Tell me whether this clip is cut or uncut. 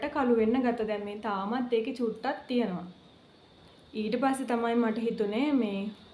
uncut